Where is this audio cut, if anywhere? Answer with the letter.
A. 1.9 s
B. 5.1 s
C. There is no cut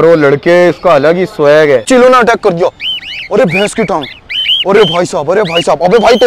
A